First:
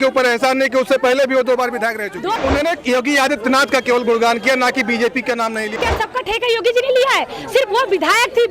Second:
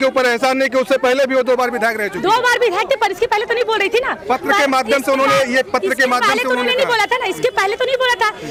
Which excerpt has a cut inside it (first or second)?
first